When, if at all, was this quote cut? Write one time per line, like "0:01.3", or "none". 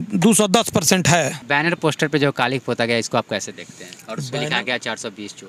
0:01.3